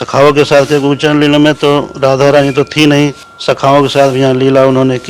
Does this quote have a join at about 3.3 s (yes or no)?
yes